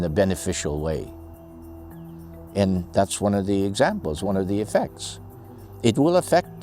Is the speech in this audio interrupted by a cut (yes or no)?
no